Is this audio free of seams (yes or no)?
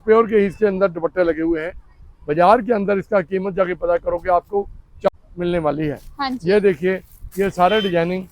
no